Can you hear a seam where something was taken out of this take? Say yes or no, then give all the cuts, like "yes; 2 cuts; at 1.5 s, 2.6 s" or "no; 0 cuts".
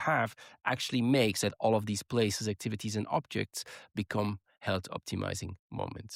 no; 0 cuts